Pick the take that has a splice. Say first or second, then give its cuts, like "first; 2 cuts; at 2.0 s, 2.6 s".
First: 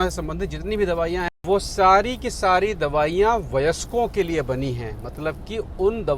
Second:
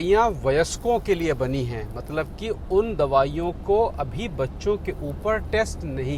first; 1 cut; at 1.2 s